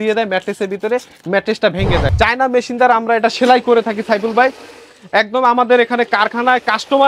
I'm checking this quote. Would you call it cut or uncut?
cut